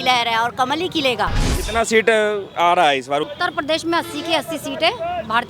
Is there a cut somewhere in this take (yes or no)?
yes